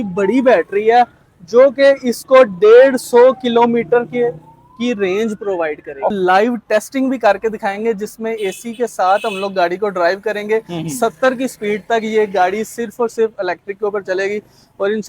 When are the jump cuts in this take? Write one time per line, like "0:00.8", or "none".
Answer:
0:06.1

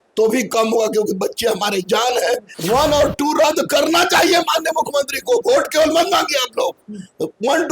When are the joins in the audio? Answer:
0:02.5

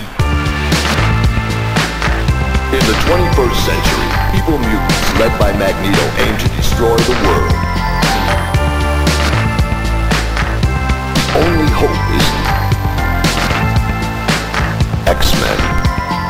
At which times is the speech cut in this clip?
none

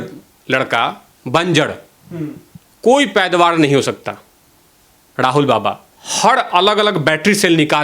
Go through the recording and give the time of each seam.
none

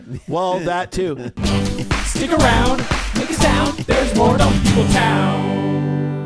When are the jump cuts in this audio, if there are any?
0:01.3

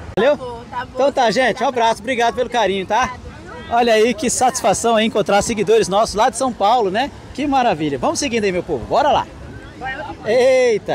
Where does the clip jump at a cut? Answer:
none

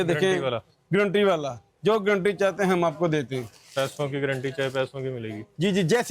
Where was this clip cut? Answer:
none

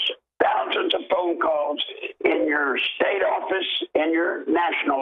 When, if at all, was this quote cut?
none

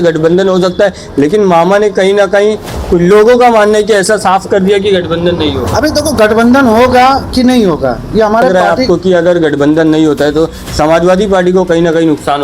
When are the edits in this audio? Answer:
0:08.5

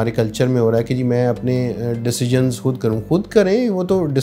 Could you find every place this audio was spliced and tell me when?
none

